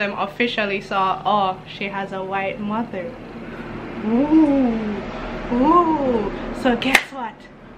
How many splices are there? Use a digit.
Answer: 0